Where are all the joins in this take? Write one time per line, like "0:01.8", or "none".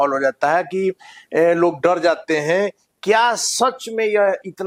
none